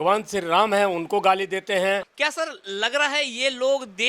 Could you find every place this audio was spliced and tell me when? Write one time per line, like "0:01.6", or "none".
0:02.1